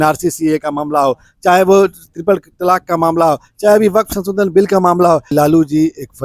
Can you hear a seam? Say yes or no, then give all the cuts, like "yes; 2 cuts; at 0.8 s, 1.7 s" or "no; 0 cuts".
yes; 1 cut; at 5.3 s